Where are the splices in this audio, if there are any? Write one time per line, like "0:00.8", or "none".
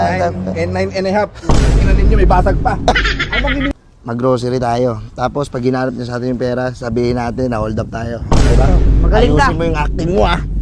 0:03.7